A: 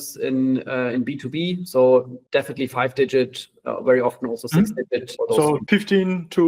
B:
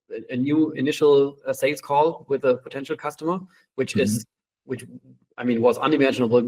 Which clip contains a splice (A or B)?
A